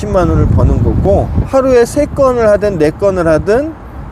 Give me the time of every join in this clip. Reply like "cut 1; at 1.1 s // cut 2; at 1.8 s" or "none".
cut 1; at 1.1 s

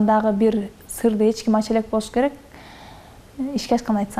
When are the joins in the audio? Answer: none

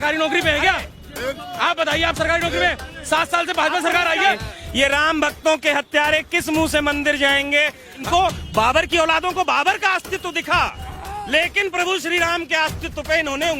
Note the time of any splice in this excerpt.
cut 1; at 4.4 s // cut 2; at 8.0 s

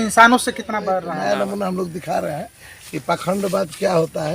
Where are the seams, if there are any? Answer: cut 1; at 1.0 s

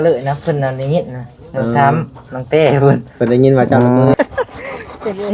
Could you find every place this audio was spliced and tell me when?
cut 1; at 4.1 s

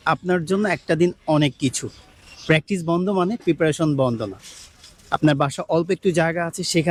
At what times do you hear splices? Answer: none

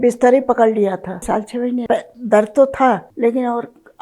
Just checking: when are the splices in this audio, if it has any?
cut 1; at 1.5 s // cut 2; at 3.1 s

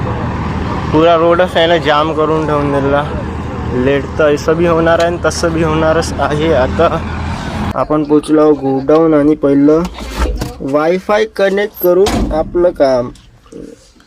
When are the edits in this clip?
cut 1; at 7.6 s

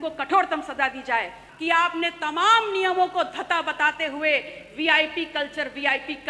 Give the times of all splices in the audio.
cut 1; at 1.4 s

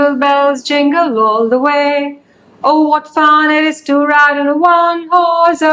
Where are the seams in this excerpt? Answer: none

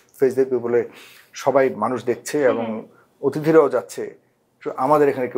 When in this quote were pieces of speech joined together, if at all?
none

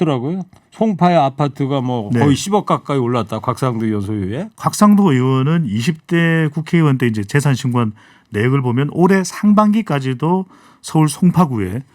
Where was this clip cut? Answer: cut 1; at 4.5 s

